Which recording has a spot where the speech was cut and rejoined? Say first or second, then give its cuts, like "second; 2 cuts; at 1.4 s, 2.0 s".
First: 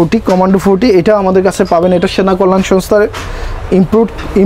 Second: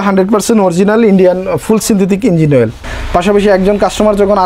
second; 1 cut; at 2.8 s